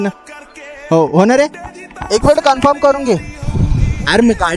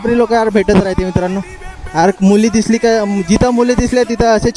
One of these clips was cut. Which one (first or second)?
first